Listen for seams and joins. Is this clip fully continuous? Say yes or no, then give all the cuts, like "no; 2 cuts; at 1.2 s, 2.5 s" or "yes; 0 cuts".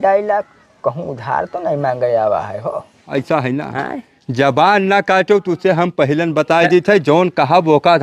no; 1 cut; at 3.0 s